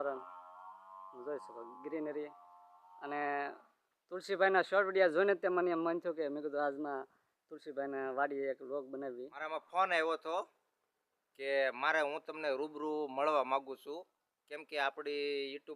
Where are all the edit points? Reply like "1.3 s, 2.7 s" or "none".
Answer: 9.5 s